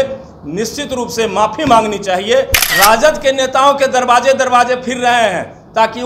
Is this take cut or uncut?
cut